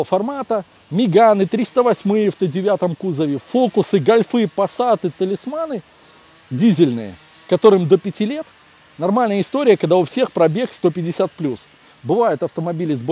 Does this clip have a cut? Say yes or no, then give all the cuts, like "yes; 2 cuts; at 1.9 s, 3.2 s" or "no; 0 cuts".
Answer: no; 0 cuts